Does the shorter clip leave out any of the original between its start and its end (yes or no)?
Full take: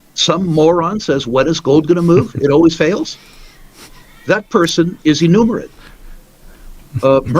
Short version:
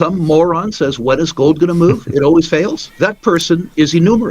yes